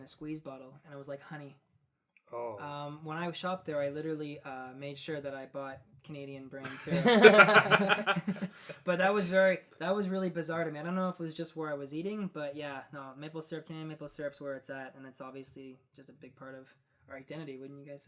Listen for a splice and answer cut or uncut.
cut